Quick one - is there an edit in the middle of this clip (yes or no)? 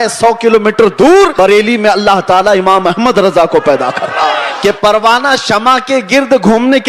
yes